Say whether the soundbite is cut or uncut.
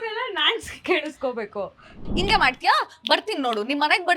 cut